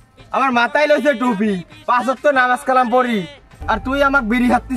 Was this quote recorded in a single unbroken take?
yes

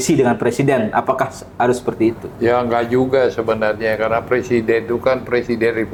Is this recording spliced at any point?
no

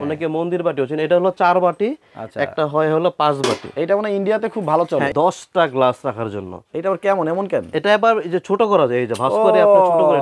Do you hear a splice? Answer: yes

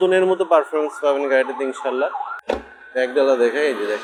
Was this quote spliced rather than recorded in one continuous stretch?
no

